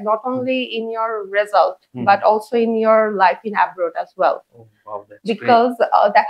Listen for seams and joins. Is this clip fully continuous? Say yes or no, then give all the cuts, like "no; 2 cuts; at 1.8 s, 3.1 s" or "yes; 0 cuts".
yes; 0 cuts